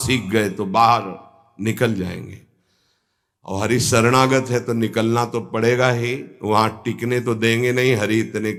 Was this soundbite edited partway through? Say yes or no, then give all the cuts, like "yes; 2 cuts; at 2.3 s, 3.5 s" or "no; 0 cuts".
no; 0 cuts